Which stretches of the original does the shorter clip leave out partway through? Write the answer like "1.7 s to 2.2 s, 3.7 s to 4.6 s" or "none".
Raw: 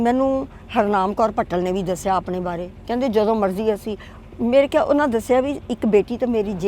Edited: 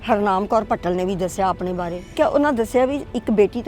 2.8 s to 4.7 s